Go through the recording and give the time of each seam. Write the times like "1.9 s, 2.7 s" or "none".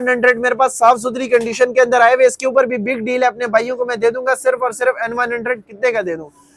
none